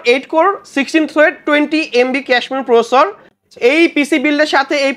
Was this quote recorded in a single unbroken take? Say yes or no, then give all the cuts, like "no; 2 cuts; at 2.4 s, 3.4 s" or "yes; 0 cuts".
yes; 0 cuts